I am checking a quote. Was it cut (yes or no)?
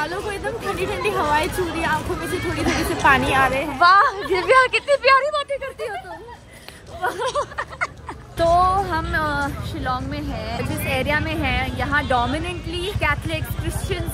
no